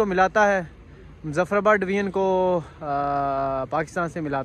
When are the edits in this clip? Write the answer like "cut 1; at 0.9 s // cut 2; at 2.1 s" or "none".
none